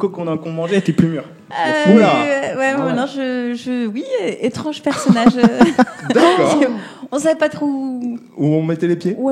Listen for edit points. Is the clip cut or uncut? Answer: uncut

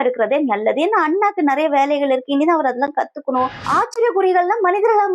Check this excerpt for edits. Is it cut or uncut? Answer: cut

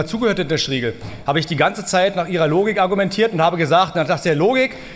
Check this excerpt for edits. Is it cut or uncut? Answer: uncut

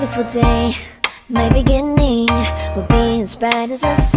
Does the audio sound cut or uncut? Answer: uncut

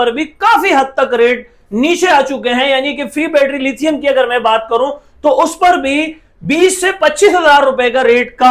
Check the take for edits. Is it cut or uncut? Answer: uncut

